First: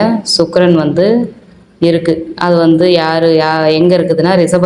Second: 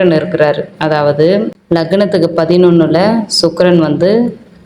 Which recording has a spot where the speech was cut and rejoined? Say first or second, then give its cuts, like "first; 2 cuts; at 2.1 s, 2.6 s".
second; 1 cut; at 1.6 s